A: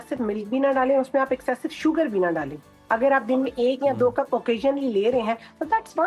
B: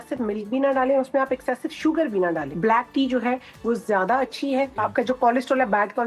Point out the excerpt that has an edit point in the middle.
B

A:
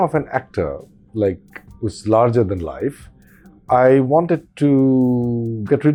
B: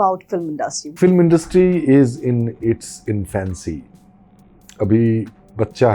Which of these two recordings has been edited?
B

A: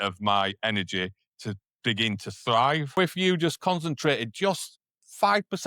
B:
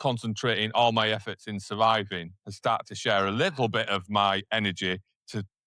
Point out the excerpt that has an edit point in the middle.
A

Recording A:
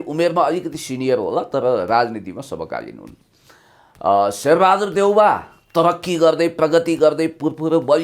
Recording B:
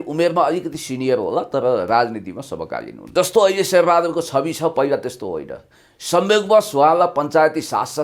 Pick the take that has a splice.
B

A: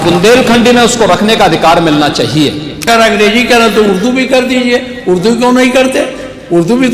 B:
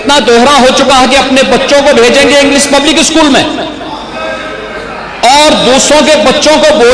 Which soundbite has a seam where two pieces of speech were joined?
A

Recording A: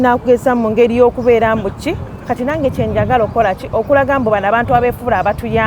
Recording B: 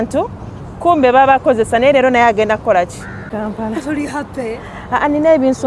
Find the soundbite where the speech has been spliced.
B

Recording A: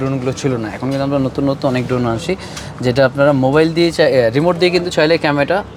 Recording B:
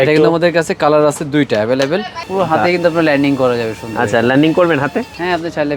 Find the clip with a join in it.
B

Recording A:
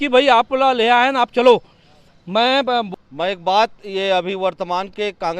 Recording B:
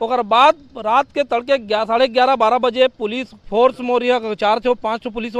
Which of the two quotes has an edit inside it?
A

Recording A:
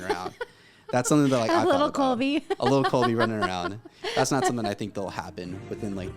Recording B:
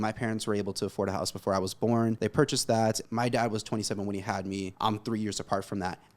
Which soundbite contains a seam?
B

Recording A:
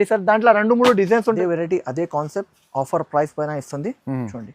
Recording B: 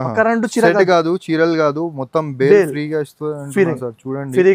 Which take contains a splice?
A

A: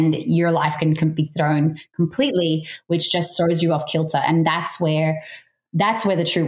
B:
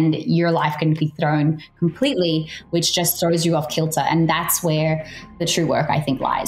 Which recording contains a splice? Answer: B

